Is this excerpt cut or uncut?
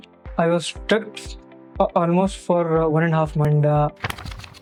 uncut